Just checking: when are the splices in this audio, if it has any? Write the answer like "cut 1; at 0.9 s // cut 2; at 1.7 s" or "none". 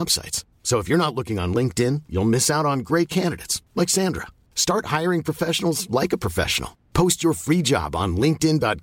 none